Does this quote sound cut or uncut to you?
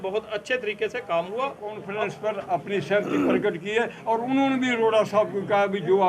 cut